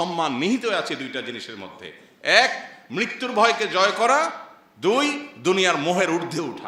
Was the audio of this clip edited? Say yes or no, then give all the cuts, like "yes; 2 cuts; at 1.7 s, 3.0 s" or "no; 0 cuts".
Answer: no; 0 cuts